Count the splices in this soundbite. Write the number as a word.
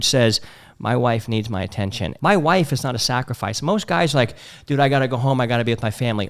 one